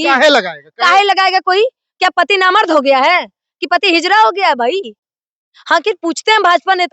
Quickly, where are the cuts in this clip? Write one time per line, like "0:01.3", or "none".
0:05.0